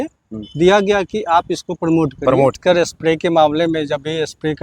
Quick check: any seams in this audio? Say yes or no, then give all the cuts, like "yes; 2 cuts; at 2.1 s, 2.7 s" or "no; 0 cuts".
yes; 1 cut; at 2.6 s